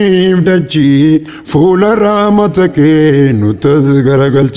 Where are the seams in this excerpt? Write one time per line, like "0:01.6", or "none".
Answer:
0:01.3